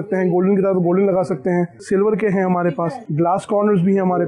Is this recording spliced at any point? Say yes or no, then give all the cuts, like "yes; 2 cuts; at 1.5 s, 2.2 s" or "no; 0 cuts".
yes; 2 cuts; at 1.8 s, 3.0 s